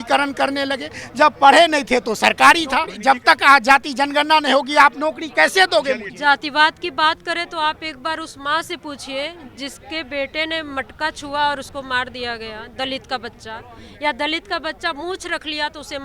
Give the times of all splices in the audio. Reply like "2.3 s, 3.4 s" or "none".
2.9 s, 6.1 s